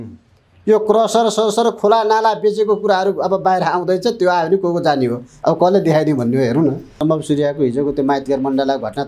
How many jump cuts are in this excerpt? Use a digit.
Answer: 1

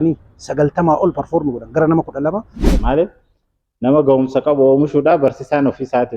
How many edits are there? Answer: 1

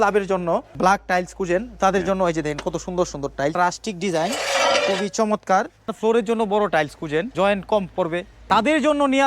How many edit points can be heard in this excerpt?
5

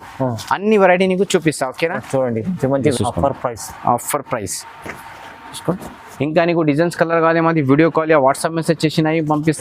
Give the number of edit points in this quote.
1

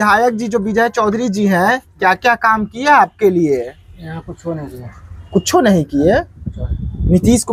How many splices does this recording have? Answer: 0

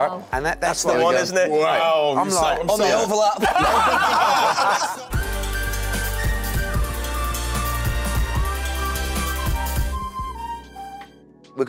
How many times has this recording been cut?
0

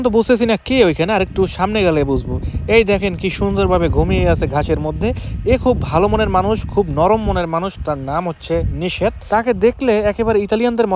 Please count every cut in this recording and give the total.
0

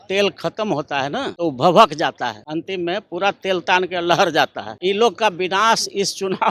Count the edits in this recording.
3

